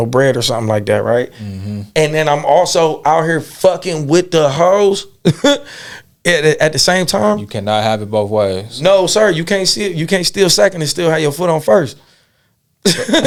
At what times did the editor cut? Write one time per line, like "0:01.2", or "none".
none